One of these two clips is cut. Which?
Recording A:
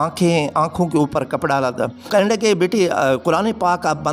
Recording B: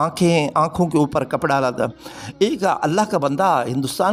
A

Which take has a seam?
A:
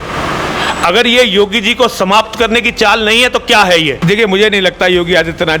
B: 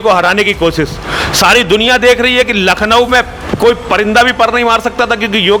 A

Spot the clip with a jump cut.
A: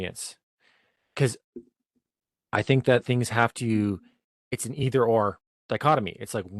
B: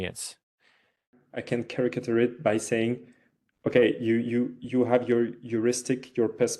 B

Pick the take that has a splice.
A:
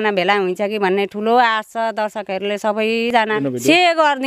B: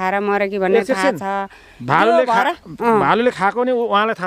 A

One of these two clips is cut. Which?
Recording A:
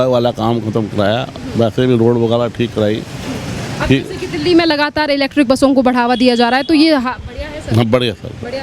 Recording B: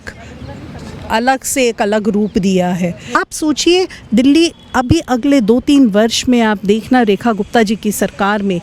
B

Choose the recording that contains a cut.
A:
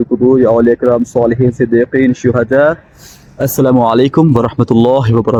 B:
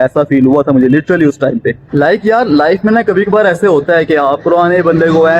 B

